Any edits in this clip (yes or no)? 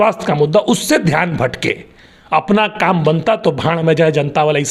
no